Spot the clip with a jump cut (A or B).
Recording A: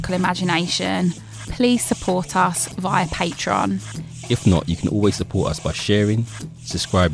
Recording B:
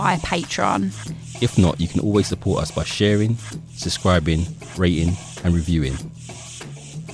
B